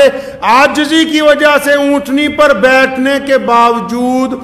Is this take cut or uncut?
uncut